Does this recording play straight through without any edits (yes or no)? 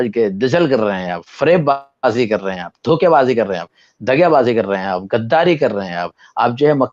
yes